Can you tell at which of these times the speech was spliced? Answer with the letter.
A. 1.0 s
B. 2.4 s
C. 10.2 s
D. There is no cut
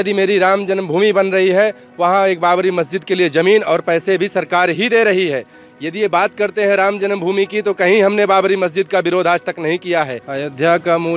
C